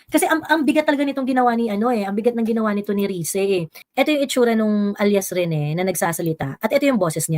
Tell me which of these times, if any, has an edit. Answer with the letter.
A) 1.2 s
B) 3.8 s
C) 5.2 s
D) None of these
B